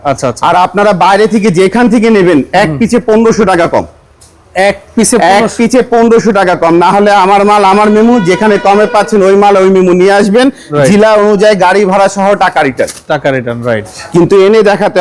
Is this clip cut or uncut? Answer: uncut